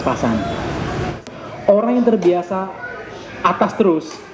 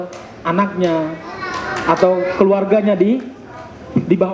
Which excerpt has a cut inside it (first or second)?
first